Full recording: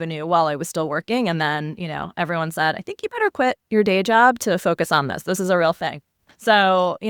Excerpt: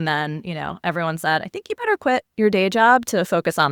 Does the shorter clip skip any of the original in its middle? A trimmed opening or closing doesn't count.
no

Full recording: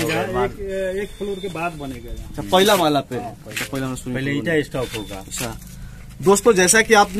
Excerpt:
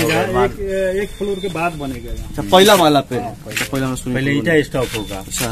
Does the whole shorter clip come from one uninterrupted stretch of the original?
yes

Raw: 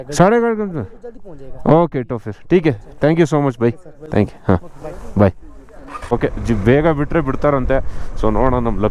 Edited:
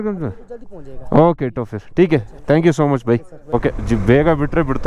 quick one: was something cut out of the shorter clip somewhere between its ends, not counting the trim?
yes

